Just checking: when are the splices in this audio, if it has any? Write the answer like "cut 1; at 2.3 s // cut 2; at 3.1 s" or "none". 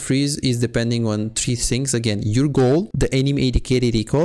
cut 1; at 2.9 s